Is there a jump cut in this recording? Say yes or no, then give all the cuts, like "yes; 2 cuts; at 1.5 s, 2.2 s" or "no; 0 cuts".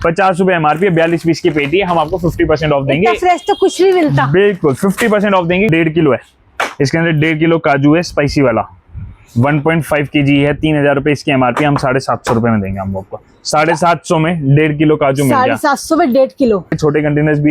yes; 2 cuts; at 5.7 s, 16.8 s